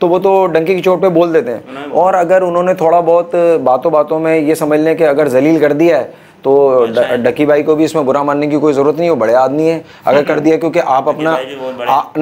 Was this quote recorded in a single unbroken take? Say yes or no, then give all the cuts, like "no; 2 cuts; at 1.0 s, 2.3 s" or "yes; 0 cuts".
yes; 0 cuts